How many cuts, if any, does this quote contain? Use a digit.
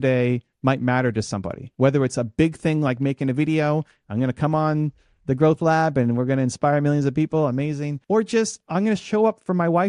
1